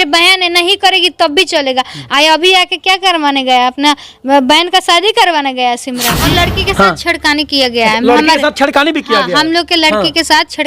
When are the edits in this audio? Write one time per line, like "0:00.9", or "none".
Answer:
0:06.2